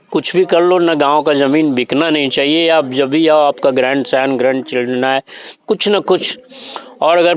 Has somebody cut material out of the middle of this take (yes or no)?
no